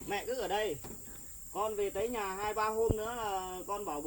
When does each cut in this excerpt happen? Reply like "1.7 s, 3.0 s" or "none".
none